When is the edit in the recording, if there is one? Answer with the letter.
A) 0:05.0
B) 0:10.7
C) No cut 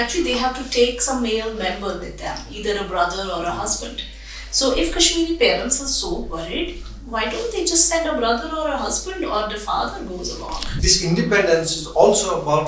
B